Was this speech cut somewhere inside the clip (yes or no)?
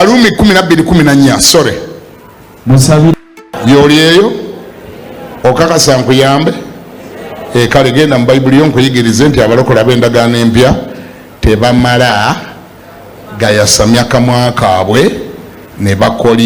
yes